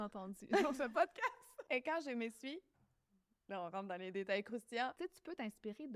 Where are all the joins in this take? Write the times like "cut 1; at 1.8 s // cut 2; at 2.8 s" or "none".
cut 1; at 1.5 s // cut 2; at 4.9 s